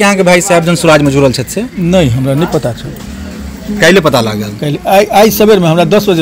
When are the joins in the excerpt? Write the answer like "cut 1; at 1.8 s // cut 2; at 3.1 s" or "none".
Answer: none